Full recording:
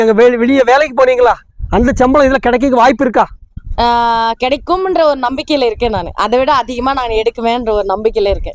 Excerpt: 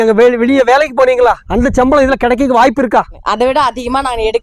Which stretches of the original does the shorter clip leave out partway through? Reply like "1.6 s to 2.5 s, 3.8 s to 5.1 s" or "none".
1.4 s to 1.7 s, 3.4 s to 6.1 s